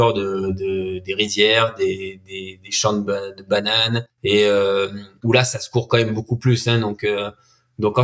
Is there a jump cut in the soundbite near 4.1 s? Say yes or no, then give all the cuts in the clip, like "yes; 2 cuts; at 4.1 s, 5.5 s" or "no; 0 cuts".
yes; 2 cuts; at 4.1 s, 5.1 s